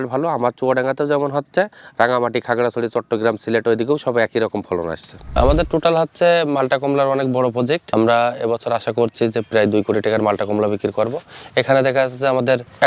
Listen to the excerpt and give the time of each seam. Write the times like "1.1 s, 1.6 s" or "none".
1.8 s, 5.1 s